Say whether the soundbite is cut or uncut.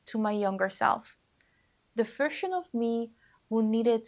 uncut